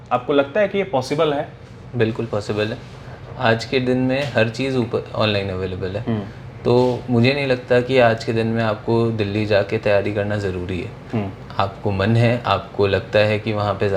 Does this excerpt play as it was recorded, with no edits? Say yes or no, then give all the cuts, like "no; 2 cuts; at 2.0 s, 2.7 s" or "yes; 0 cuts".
yes; 0 cuts